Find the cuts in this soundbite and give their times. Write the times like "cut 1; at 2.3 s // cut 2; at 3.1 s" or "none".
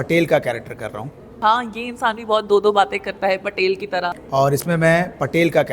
cut 1; at 1.4 s // cut 2; at 4.1 s